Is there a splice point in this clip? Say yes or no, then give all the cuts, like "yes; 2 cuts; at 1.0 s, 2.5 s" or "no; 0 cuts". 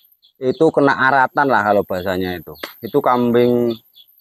no; 0 cuts